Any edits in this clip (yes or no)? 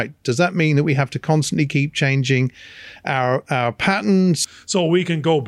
yes